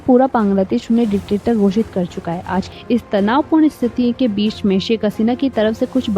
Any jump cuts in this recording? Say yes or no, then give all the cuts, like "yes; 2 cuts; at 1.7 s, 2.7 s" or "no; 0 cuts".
yes; 1 cut; at 2.7 s